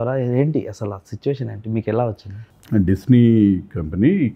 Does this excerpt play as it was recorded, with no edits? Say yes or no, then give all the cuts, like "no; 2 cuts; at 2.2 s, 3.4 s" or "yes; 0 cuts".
yes; 0 cuts